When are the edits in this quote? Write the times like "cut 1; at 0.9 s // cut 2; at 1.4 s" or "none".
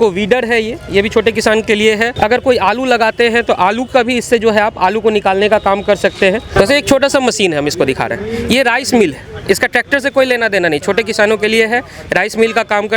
cut 1; at 2.1 s // cut 2; at 6.4 s